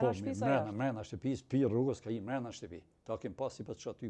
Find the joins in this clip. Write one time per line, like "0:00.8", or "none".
none